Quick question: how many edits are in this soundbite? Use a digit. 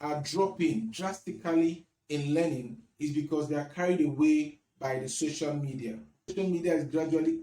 1